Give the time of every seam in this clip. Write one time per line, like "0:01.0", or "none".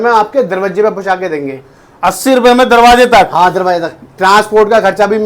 none